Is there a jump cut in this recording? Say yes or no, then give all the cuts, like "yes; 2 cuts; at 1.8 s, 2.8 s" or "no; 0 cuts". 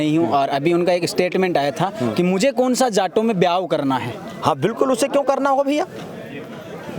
no; 0 cuts